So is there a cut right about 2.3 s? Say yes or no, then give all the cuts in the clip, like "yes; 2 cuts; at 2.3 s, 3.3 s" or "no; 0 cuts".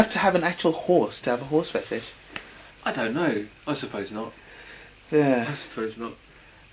no; 1 cut; at 5.6 s